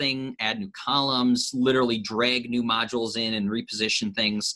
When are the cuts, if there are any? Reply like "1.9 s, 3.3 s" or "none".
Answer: none